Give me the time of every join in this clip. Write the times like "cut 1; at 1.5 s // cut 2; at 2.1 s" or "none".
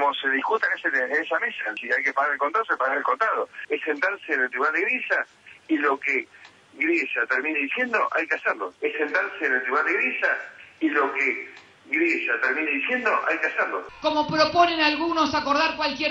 cut 1; at 13.8 s